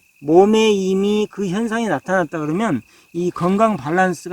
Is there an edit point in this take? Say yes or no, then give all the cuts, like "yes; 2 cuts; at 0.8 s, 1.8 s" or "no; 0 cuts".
no; 0 cuts